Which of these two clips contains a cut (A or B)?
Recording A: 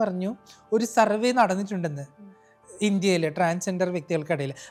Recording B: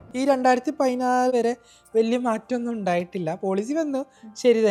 B